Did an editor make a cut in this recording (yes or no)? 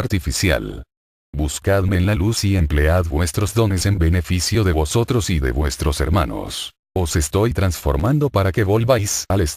yes